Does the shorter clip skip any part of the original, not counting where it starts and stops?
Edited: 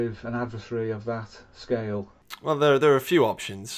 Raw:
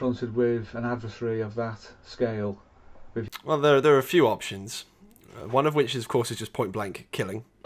yes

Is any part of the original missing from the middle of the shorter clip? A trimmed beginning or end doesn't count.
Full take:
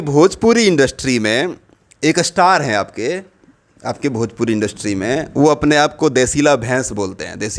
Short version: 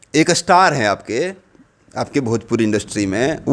no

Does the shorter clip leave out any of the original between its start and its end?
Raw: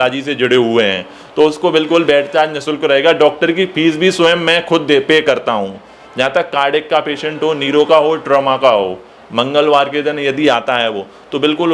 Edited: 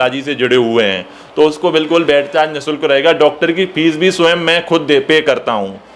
no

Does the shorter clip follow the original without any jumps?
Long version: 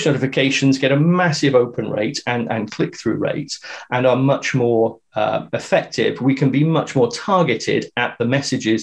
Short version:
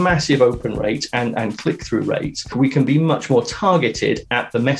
no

